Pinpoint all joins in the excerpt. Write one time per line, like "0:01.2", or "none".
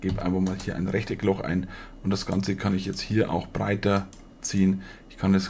none